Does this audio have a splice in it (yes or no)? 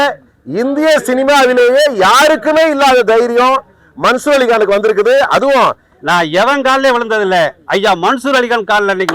yes